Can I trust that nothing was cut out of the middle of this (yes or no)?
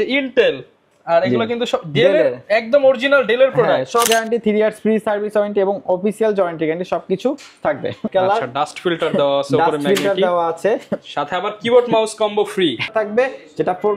no